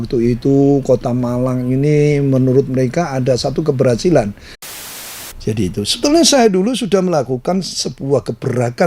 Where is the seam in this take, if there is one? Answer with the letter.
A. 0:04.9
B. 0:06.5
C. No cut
A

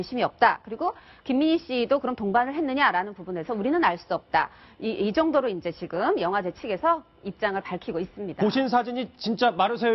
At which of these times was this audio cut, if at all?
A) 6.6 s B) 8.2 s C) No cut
B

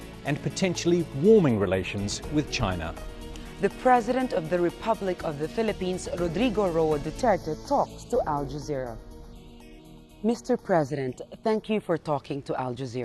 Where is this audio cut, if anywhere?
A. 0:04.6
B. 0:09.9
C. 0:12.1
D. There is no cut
D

